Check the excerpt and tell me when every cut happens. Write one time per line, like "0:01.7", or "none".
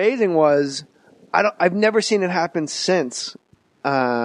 0:01.4